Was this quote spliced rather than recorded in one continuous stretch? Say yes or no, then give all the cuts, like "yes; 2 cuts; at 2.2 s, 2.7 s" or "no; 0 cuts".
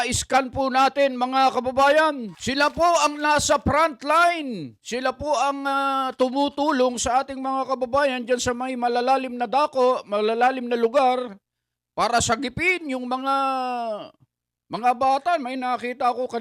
yes; 1 cut; at 2.3 s